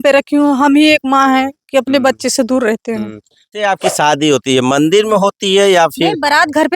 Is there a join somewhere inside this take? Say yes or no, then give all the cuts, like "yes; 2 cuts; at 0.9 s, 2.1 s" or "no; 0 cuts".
yes; 1 cut; at 3.5 s